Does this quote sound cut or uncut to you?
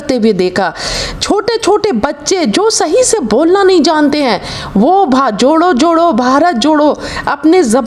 uncut